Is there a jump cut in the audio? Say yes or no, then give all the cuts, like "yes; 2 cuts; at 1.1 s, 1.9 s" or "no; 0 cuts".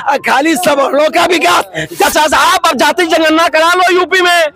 yes; 1 cut; at 2.1 s